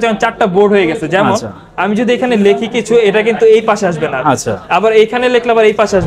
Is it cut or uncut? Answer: uncut